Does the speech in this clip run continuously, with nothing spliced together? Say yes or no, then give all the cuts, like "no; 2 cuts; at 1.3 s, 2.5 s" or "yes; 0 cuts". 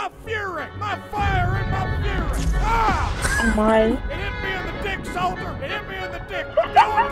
yes; 0 cuts